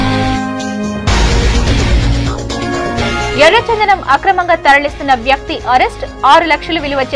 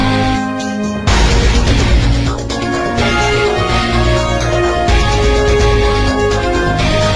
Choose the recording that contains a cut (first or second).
first